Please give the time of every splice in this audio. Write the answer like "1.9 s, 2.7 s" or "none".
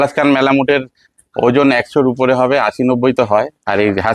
none